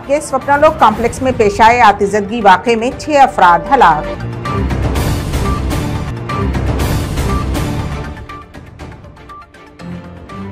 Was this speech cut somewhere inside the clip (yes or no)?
no